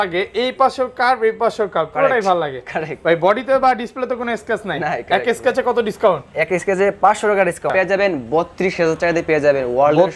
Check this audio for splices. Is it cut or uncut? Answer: cut